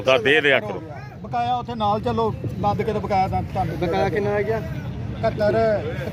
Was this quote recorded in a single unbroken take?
yes; 0 cuts

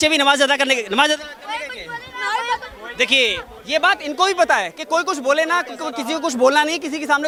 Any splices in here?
no; 0 cuts

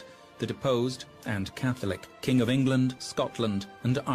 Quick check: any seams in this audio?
no; 0 cuts

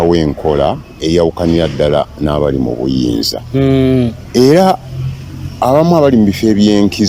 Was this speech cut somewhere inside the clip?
no; 0 cuts

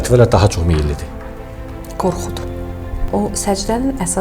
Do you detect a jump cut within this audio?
yes; 1 cut; at 2.9 s

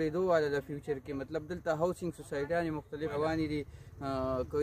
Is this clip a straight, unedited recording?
no; 1 cut; at 3.1 s

